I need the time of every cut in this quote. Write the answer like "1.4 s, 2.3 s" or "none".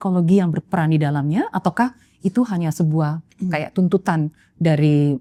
none

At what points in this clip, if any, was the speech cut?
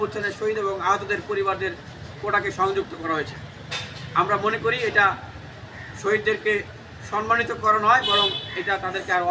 none

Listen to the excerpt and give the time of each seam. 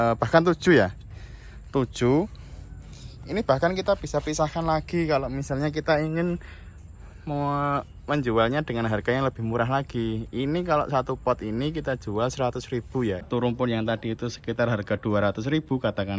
13.3 s

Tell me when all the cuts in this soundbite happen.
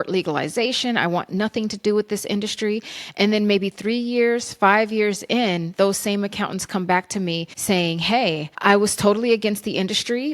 7.5 s, 8.5 s

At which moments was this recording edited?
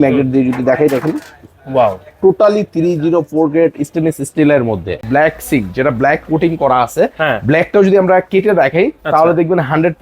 5.0 s

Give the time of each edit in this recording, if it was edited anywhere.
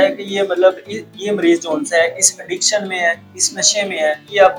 none

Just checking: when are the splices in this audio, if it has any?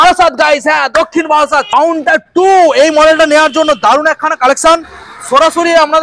1.7 s

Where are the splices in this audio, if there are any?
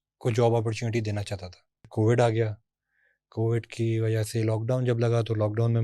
1.9 s

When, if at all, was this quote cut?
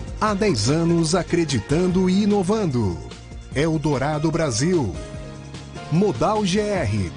none

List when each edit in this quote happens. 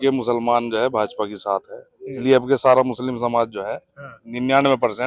2.2 s

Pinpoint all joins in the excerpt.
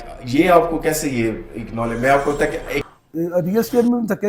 2.9 s

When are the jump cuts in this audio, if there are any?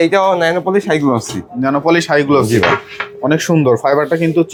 none

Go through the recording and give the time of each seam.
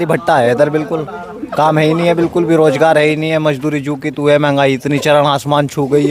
none

